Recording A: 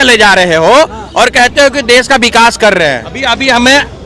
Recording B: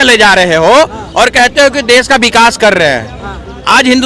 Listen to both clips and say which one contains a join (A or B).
A